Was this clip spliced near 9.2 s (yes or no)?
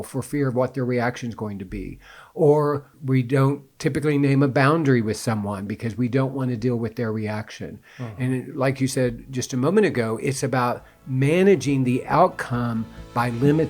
no